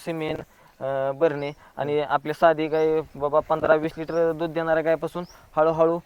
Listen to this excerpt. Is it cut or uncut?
uncut